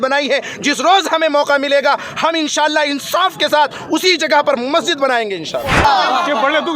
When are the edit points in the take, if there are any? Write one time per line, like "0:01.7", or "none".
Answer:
0:05.8